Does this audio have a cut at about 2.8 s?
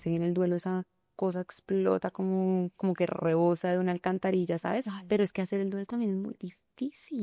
no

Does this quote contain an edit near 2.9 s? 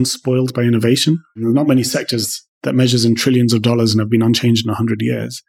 no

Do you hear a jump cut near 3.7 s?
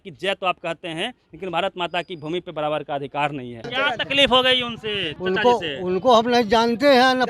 yes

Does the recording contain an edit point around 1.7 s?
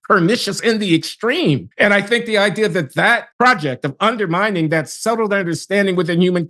yes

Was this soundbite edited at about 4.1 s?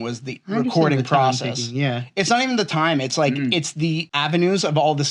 yes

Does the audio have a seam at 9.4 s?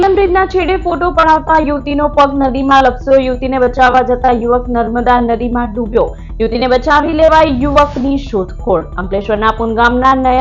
no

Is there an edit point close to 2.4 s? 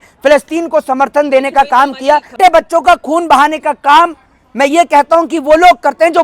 yes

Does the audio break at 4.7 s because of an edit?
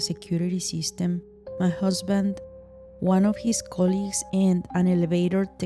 yes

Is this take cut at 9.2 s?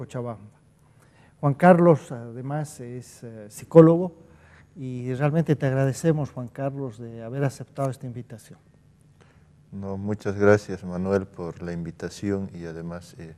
yes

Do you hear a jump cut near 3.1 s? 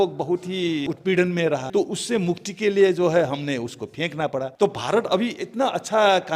no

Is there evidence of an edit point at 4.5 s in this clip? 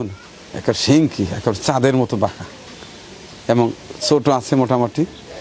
no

